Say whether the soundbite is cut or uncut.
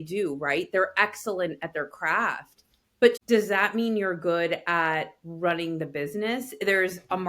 cut